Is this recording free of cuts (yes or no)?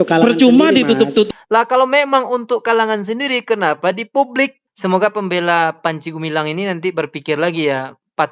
no